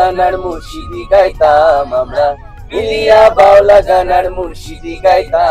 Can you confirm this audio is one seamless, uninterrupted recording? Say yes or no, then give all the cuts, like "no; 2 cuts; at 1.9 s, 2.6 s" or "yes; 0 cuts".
yes; 0 cuts